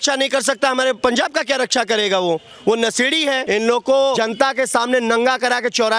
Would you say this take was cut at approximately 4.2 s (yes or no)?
yes